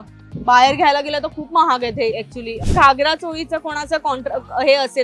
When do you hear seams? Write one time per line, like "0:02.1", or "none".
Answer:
0:02.6